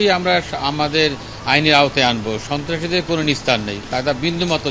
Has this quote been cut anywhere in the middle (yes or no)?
no